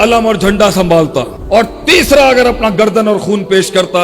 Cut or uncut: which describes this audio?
cut